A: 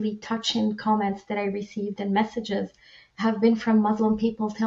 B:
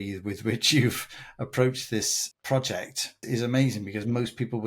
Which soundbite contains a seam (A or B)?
B